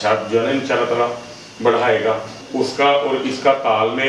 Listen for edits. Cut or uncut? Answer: cut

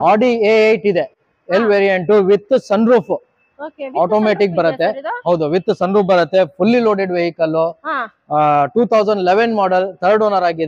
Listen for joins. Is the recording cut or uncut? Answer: uncut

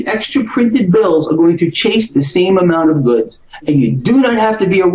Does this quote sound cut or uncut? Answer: uncut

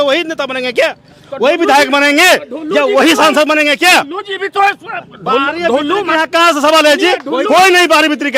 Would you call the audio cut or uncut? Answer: uncut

